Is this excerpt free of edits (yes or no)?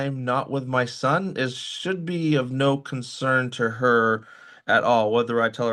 yes